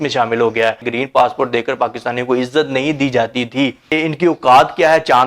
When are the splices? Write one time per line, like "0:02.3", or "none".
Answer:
0:00.8
0:03.9

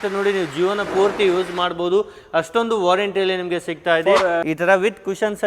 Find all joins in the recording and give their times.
0:04.4

